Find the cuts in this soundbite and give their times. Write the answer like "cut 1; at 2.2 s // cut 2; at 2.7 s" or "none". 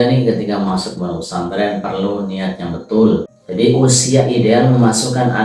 cut 1; at 3.4 s